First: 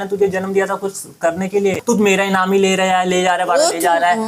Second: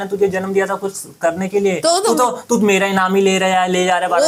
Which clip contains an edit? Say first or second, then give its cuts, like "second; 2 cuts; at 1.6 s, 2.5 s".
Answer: first; 1 cut; at 1.8 s